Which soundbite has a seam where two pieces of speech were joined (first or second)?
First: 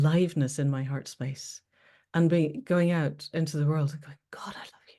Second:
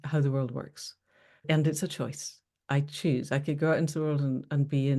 second